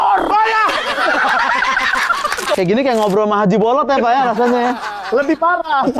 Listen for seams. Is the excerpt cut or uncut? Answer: cut